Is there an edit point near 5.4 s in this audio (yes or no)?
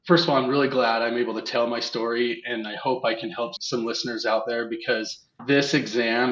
no